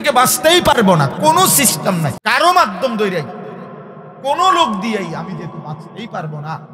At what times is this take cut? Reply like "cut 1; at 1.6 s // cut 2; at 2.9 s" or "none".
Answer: cut 1; at 2.2 s